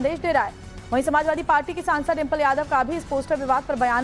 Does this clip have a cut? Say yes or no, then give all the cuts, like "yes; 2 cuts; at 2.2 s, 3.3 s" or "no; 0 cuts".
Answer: yes; 1 cut; at 2.3 s